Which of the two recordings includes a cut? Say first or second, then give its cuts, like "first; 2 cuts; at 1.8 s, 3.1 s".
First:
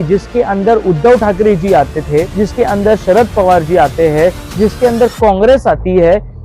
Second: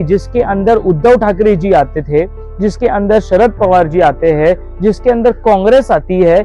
first; 1 cut; at 2.3 s